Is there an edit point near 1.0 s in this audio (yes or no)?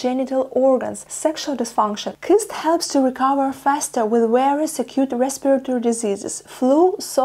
yes